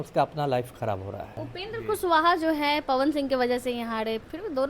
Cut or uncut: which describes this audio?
cut